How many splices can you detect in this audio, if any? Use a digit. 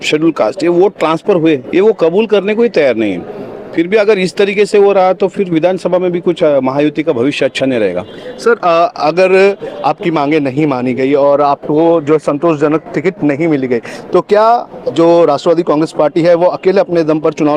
0